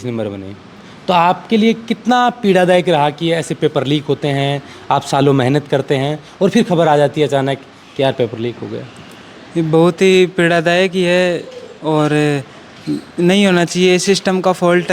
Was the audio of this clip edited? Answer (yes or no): no